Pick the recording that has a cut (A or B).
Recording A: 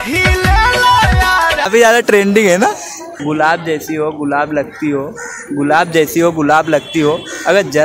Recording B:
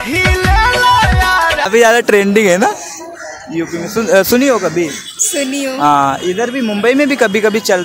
A